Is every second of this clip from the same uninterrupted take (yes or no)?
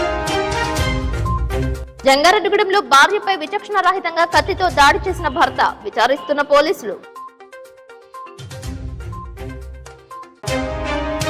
yes